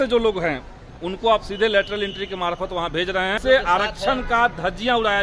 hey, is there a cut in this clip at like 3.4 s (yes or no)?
yes